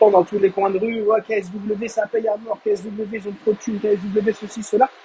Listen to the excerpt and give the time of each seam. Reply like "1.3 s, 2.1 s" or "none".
none